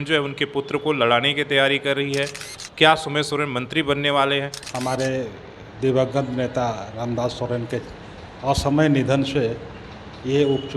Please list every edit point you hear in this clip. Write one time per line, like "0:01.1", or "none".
0:04.6